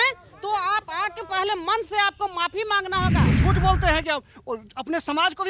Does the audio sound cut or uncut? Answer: cut